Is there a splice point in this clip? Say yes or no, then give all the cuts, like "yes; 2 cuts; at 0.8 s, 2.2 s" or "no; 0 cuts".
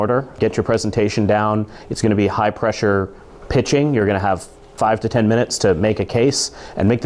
no; 0 cuts